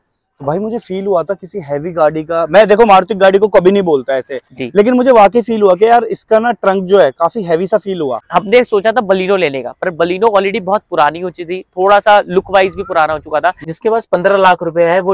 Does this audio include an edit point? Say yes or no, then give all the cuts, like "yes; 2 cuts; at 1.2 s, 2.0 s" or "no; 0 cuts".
yes; 2 cuts; at 8.2 s, 13.7 s